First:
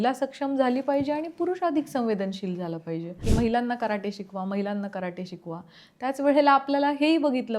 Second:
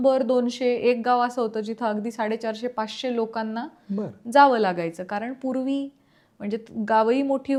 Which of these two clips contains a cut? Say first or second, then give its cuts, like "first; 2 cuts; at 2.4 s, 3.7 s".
first; 1 cut; at 3.2 s